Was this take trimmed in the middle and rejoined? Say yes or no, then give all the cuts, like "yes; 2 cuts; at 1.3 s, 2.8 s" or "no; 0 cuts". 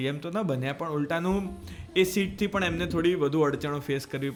no; 0 cuts